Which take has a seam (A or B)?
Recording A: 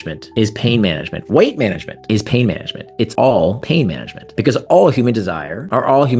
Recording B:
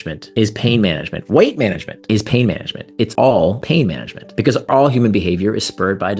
B